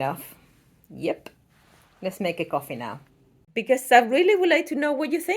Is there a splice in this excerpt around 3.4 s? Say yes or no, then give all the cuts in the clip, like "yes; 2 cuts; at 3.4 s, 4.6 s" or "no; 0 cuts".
yes; 1 cut; at 3.4 s